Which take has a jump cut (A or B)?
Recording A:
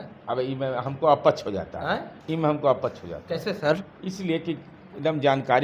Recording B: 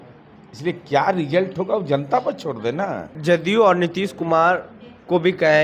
B